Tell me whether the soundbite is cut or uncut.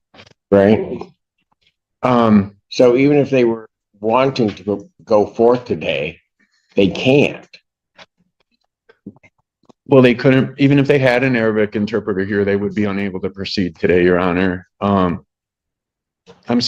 uncut